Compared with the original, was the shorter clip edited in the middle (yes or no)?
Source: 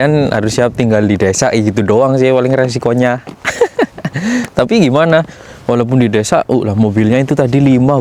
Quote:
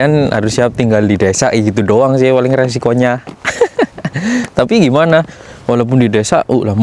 no